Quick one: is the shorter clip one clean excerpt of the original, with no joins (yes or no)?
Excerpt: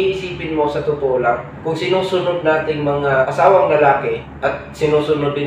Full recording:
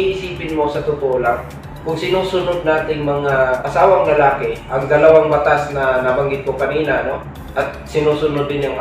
no